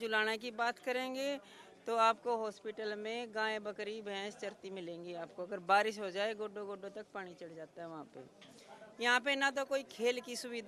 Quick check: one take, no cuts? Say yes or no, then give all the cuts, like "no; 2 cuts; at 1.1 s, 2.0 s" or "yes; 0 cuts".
yes; 0 cuts